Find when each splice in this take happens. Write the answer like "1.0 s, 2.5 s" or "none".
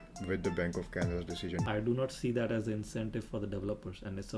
1.6 s